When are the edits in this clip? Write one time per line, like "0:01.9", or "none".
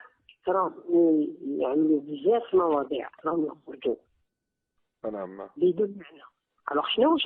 0:06.0